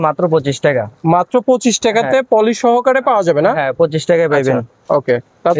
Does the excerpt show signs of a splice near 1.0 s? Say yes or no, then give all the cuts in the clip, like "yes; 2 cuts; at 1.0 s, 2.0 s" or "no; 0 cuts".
no; 0 cuts